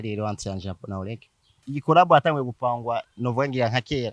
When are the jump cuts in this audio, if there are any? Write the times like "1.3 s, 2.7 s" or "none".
1.6 s

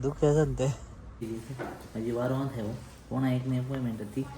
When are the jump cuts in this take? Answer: 1.2 s

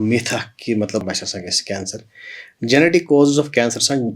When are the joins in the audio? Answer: 1.0 s

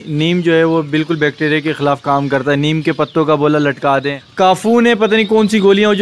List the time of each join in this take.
4.2 s

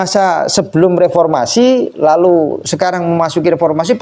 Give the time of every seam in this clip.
none

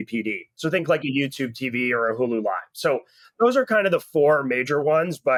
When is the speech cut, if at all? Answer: none

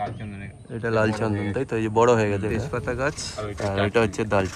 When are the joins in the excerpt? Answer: 2.5 s

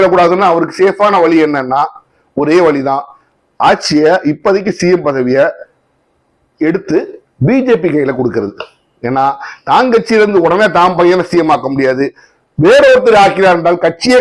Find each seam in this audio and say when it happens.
none

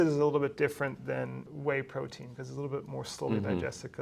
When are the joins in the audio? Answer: 1.5 s

